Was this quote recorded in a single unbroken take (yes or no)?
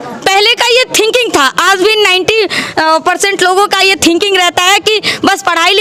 yes